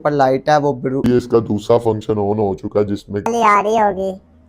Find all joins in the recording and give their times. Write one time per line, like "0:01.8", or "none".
0:01.0
0:03.3